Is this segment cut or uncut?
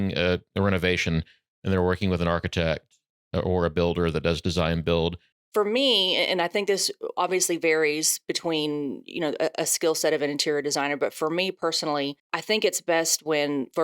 cut